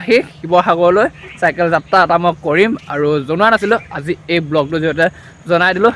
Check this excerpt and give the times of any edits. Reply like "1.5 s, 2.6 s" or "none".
none

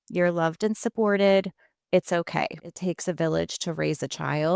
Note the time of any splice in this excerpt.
2.8 s

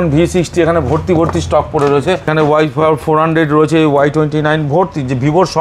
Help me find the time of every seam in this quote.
2.3 s

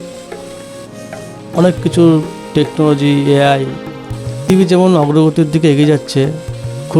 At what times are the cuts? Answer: 4.4 s

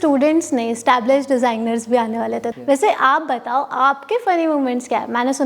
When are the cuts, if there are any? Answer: 2.5 s

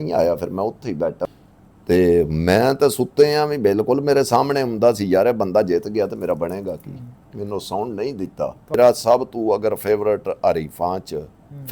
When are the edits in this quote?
1.2 s, 8.8 s

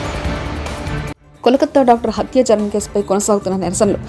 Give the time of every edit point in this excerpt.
1.2 s

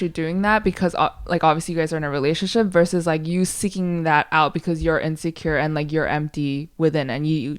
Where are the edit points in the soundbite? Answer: none

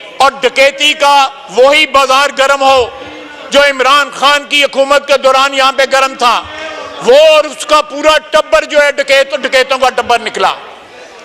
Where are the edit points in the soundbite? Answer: none

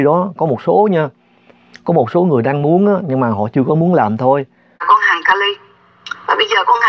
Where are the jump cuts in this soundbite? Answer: 4.9 s

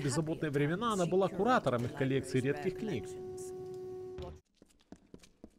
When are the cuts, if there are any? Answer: 4.3 s

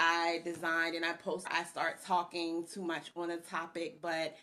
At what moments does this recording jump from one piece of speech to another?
none

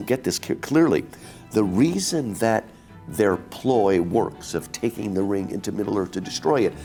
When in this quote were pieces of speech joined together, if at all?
none

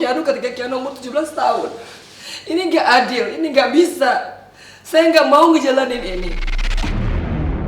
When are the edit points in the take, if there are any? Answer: none

